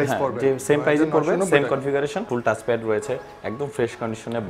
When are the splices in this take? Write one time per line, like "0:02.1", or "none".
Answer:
0:02.2